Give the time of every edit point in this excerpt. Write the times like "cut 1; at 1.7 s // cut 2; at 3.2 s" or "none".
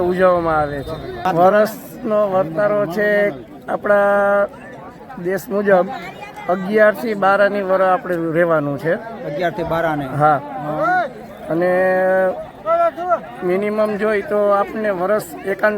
cut 1; at 1.2 s